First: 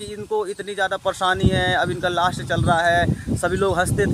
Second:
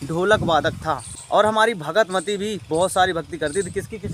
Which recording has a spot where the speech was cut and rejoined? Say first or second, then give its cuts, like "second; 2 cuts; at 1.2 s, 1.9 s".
second; 1 cut; at 1.1 s